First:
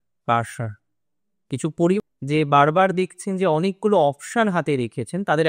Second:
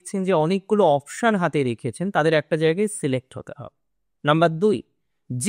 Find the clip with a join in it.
first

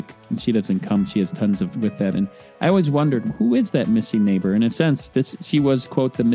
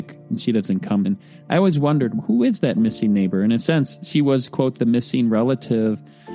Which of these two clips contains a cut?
second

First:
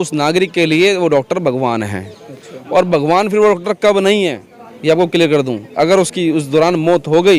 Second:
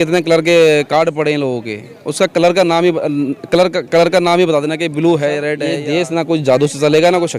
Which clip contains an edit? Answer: second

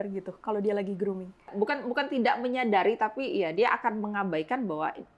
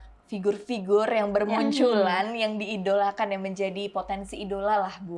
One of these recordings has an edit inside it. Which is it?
first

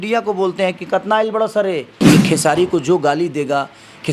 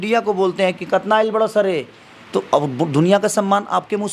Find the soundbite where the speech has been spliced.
first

